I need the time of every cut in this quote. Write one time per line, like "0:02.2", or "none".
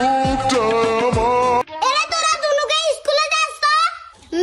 0:01.6